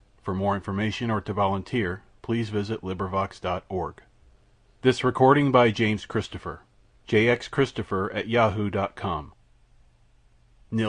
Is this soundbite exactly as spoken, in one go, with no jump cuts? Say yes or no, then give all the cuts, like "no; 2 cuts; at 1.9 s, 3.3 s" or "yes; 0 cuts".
yes; 0 cuts